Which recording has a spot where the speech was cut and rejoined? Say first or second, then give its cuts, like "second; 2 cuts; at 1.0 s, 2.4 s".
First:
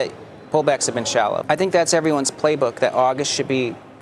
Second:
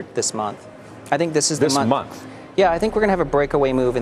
first; 1 cut; at 1.4 s